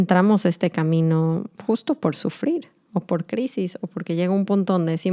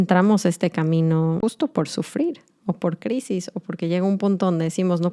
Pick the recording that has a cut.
second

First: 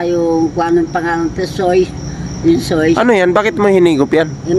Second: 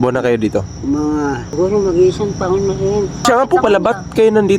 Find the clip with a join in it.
second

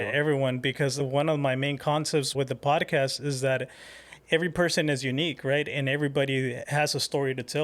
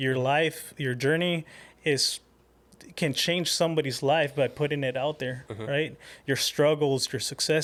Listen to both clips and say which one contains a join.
first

